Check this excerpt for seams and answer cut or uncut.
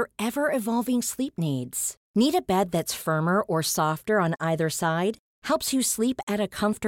uncut